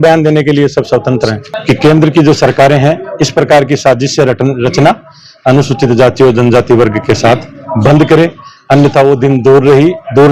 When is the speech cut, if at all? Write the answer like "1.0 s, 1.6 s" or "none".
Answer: 1.5 s